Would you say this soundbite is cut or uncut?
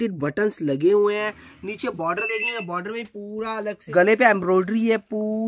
cut